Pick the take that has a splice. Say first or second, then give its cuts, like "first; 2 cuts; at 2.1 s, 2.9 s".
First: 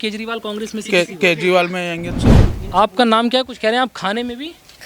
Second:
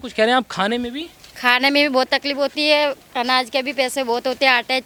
first; 1 cut; at 2.4 s